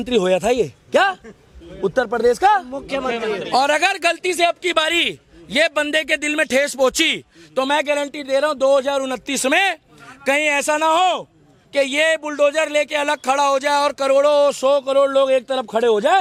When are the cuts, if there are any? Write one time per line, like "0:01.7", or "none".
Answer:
none